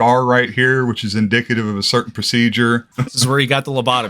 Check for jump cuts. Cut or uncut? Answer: cut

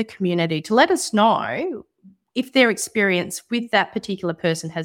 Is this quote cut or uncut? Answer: uncut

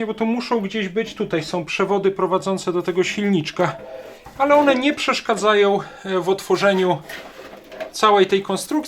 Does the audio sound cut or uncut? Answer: uncut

